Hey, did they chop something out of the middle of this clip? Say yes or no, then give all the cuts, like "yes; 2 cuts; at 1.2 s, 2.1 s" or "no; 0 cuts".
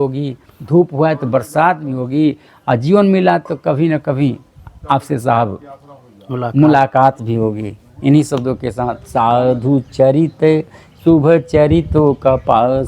yes; 1 cut; at 8.9 s